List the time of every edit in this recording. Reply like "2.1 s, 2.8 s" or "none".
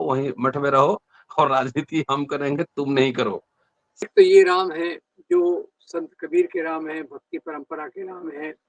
4.1 s